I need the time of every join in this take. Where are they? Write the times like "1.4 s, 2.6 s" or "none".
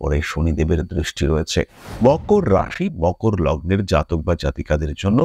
1.8 s